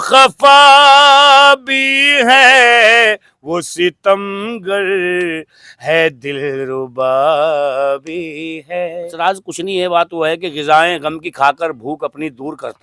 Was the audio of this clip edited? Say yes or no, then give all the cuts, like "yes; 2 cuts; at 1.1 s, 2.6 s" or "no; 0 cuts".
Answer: yes; 1 cut; at 9.1 s